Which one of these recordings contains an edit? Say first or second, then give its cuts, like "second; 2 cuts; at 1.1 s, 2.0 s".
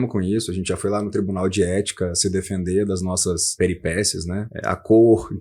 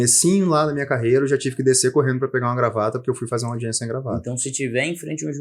first; 2 cuts; at 3.5 s, 4.5 s